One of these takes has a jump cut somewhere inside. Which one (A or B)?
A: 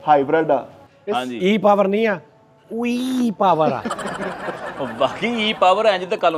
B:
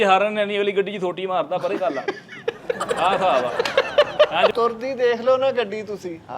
B